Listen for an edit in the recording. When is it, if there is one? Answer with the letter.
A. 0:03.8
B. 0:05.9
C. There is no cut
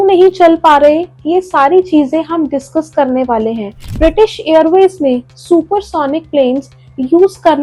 A